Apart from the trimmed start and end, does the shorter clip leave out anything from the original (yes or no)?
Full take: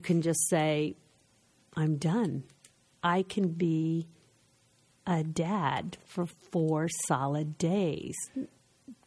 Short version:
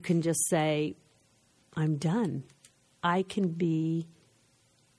no